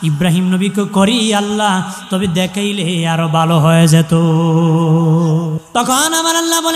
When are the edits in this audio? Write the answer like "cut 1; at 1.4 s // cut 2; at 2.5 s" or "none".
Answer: cut 1; at 5.6 s